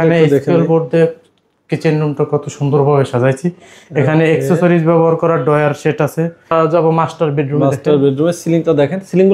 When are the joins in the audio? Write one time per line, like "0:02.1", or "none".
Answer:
0:06.5